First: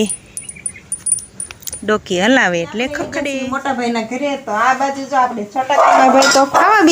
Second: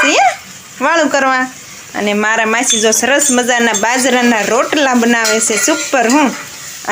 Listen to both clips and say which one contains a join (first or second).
first